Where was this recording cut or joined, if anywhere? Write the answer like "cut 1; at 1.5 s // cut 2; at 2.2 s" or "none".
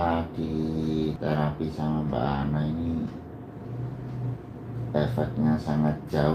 cut 1; at 1.2 s